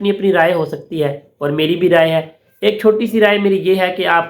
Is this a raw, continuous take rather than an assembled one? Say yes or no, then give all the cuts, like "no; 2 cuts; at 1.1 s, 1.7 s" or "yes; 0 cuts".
yes; 0 cuts